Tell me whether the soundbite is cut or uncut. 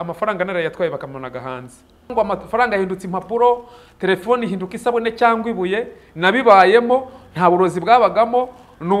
cut